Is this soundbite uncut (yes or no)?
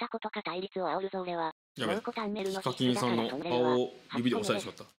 no